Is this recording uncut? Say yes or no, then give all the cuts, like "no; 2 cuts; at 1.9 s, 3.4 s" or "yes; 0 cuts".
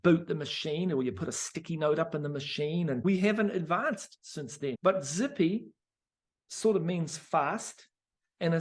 no; 2 cuts; at 3.0 s, 4.8 s